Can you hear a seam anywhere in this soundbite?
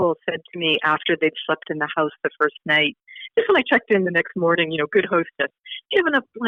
no; 0 cuts

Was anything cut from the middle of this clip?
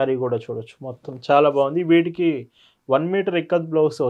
no; 0 cuts

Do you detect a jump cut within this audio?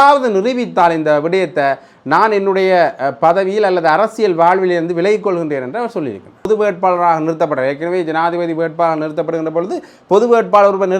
yes; 1 cut; at 6.5 s

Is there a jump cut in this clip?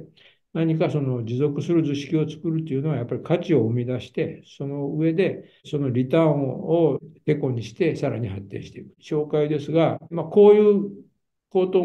yes; 1 cut; at 8.9 s

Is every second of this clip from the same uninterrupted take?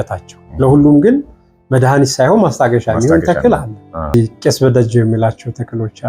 no; 1 cut; at 4.1 s

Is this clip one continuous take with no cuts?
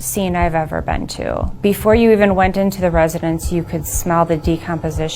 no; 1 cut; at 1.5 s

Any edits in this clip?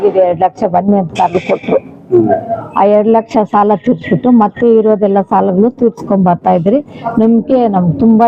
no; 0 cuts

